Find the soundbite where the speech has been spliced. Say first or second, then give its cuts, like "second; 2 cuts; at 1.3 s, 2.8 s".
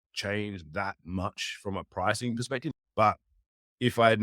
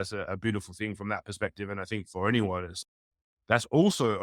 first; 1 cut; at 2.8 s